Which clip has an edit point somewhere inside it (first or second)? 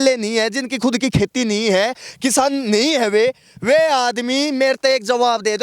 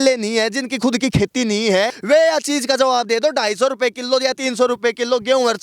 second